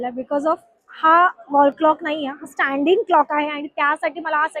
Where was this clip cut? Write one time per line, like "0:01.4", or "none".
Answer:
none